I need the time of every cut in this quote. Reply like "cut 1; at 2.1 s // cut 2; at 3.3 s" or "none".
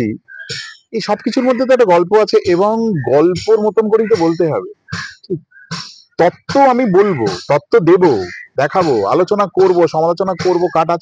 none